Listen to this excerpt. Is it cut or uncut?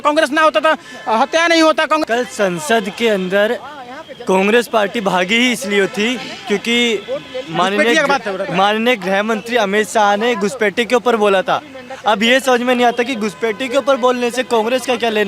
cut